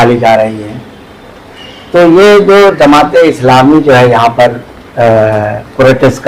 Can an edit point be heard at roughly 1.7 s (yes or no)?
no